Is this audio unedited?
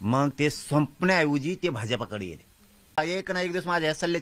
no; 1 cut; at 3.0 s

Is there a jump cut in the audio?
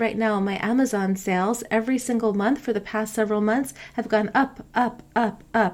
no; 0 cuts

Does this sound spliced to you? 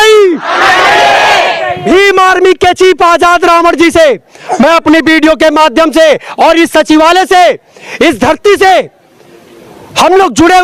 no; 0 cuts

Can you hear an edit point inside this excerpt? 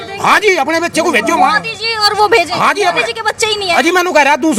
no; 0 cuts

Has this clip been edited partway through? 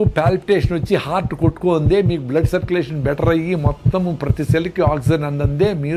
no; 0 cuts

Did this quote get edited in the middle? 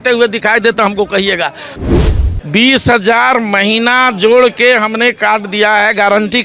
yes; 1 cut; at 1.9 s

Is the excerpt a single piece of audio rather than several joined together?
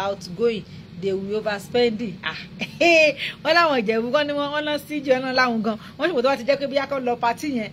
yes; 0 cuts

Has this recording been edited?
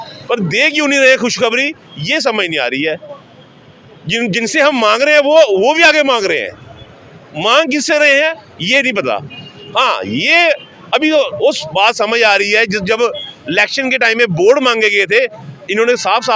no; 0 cuts

